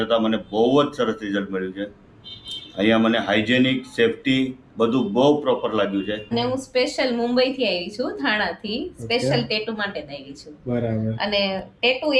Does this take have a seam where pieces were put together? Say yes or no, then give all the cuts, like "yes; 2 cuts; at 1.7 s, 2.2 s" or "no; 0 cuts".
yes; 1 cut; at 6.3 s